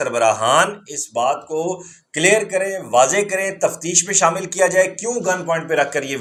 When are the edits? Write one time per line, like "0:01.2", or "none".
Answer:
none